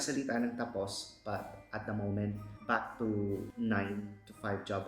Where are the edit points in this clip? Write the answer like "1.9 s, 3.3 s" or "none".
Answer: 2.5 s, 3.5 s